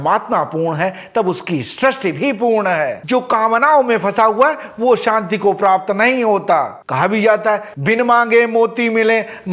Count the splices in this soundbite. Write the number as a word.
two